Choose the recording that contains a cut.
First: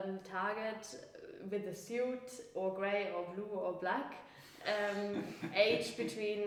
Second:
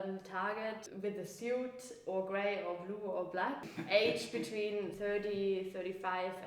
second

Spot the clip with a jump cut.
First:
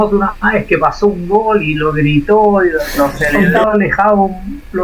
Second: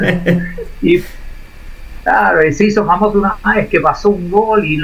first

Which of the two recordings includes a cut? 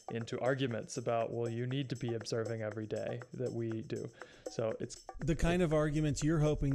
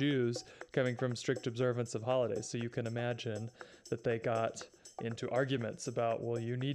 first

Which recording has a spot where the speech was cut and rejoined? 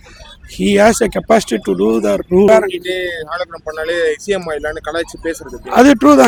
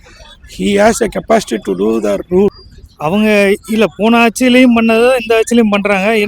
second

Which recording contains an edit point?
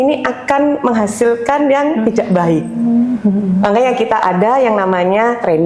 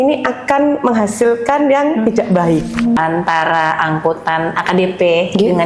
second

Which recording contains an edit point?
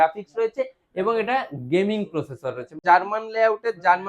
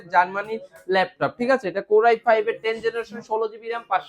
first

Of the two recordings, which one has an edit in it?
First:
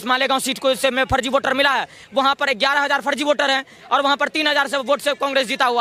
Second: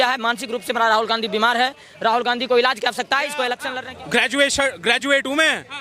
second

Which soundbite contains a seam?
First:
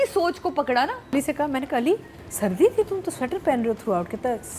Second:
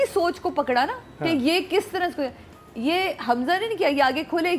first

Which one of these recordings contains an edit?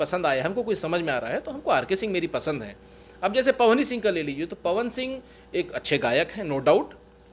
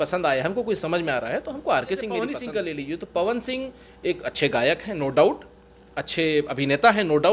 second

